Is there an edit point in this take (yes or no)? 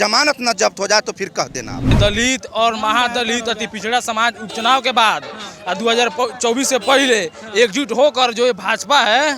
yes